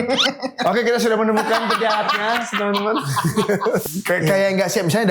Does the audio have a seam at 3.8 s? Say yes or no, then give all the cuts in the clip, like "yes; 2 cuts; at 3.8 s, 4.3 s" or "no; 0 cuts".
yes; 1 cut; at 3.8 s